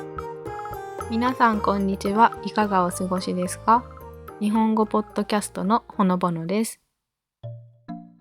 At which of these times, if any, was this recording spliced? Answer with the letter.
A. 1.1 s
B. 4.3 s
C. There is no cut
A